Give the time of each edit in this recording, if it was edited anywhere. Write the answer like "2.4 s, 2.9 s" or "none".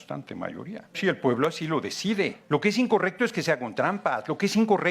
0.9 s, 2.4 s